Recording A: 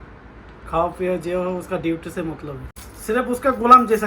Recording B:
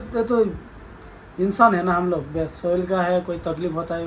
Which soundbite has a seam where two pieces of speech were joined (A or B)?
A